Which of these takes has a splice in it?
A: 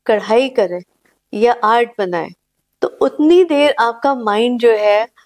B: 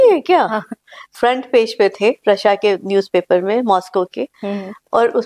B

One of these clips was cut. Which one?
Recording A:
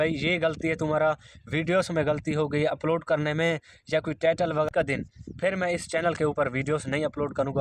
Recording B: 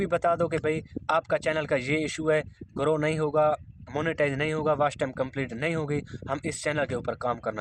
A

